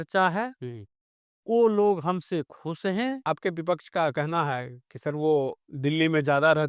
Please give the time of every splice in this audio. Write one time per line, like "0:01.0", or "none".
0:03.2